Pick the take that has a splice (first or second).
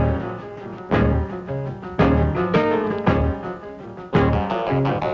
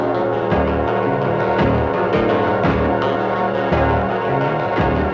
first